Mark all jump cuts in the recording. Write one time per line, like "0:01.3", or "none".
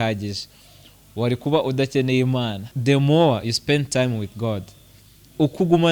0:02.6

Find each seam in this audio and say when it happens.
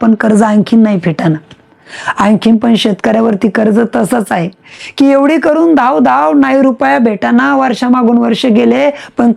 none

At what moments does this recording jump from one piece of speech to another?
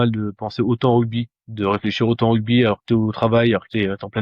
none

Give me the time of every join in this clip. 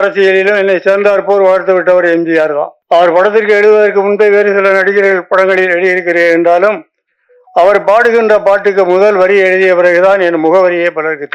0:02.7

